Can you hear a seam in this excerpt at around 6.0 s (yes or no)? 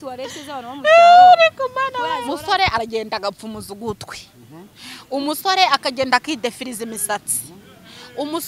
no